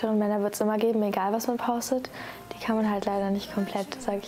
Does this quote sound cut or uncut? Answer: cut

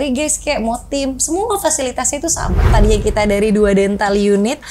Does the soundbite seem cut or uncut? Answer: cut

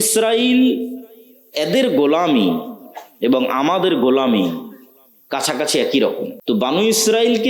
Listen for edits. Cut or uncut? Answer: cut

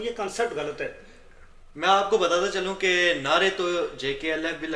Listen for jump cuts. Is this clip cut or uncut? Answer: uncut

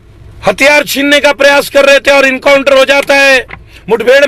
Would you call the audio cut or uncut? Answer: uncut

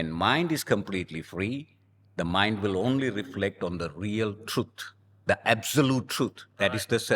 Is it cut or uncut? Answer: uncut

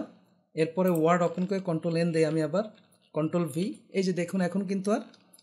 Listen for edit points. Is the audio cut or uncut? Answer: uncut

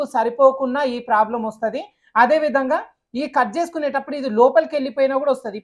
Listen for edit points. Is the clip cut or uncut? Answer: uncut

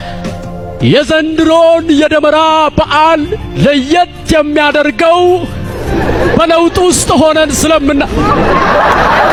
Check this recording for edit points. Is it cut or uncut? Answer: uncut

